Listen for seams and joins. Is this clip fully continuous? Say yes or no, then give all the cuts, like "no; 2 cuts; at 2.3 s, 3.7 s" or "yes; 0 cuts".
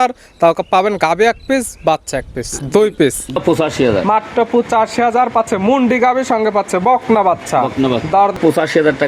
no; 2 cuts; at 3.4 s, 8.3 s